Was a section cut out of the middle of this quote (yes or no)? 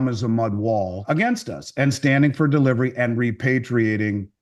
yes